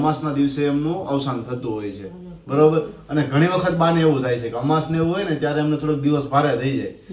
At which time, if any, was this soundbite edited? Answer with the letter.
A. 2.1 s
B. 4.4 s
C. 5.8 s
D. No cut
D